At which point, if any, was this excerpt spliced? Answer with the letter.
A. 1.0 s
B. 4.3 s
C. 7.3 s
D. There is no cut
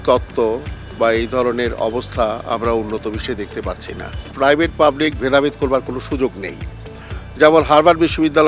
B